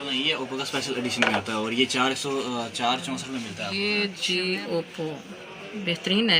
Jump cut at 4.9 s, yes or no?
no